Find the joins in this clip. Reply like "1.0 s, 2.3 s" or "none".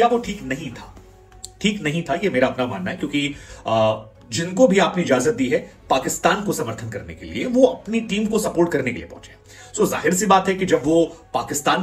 none

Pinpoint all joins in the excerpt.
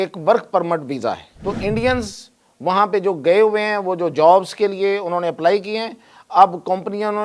1.3 s

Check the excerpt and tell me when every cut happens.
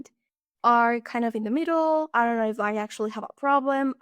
2.1 s

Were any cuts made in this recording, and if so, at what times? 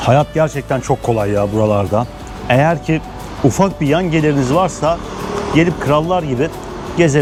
none

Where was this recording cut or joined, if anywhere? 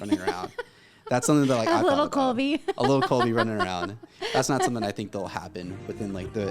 none

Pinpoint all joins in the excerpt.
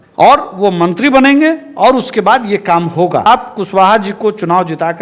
3.2 s

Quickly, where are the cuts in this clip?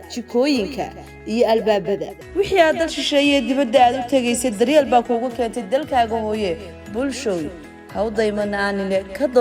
2.1 s

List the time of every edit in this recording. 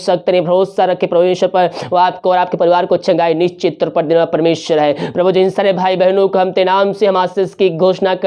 none

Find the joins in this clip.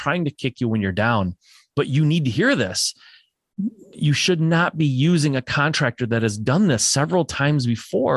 none

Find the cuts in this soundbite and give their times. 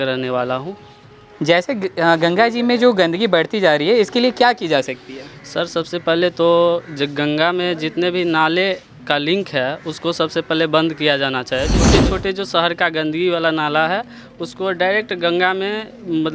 11.9 s

